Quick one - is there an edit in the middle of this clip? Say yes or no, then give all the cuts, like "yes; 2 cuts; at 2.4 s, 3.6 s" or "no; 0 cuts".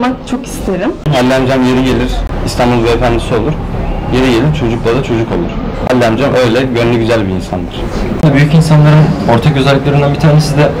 yes; 3 cuts; at 1.1 s, 2.4 s, 8.2 s